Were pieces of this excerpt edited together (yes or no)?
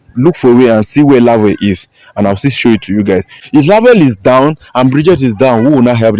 yes